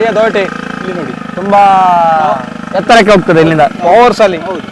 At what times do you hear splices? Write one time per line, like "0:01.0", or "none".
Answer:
none